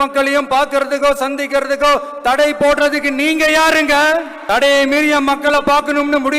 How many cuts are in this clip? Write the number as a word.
one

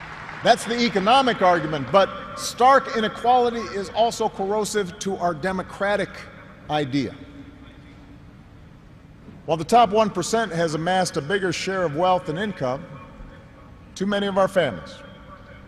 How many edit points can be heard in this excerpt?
one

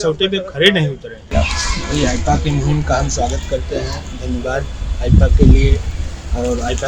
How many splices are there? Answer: one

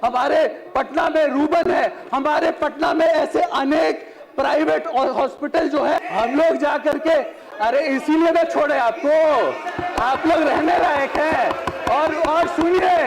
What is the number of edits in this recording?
one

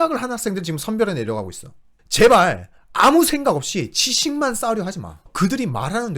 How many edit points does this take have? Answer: one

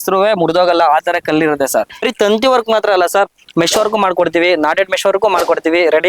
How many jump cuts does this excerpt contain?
one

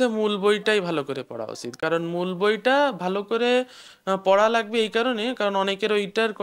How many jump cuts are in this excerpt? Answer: zero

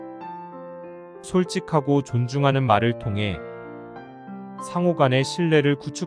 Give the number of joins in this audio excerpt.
one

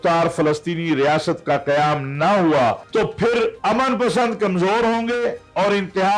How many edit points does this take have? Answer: two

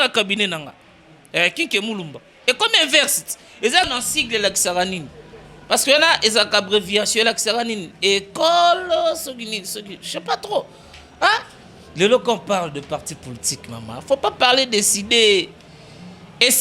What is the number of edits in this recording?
one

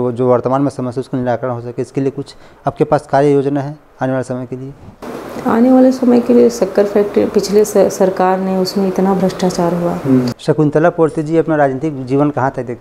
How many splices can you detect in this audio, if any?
one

